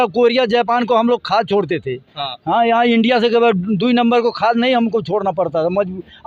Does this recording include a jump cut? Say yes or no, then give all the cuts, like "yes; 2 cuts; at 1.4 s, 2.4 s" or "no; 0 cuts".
no; 0 cuts